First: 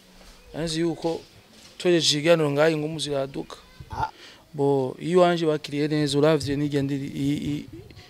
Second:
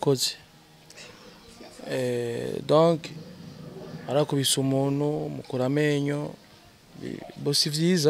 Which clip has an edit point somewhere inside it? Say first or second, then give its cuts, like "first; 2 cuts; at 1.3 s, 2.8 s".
first; 1 cut; at 4.1 s